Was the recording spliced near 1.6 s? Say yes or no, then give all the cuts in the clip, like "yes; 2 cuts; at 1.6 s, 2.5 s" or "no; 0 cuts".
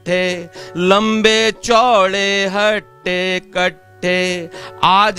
no; 0 cuts